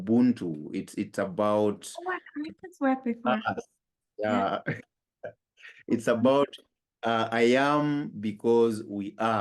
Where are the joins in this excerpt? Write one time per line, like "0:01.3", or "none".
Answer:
none